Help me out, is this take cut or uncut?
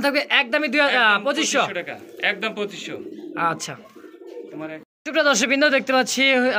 uncut